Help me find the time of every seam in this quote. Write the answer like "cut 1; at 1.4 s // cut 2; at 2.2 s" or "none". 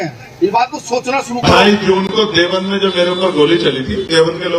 cut 1; at 1.4 s